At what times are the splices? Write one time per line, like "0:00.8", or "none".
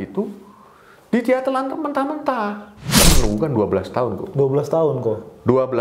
0:03.1